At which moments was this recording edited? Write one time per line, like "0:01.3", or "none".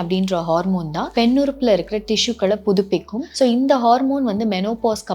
0:01.0
0:03.2